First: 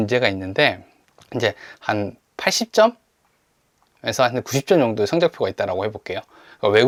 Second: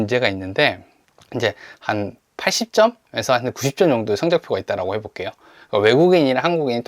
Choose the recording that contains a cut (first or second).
second